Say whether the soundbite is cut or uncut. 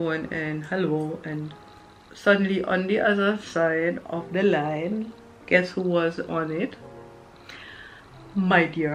uncut